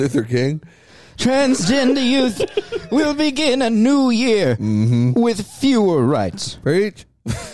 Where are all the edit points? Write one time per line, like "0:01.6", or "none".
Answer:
none